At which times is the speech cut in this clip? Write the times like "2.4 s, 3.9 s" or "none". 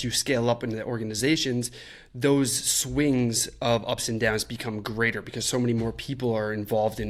none